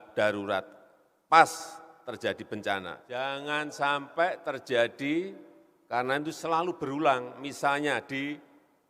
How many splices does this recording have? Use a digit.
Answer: 1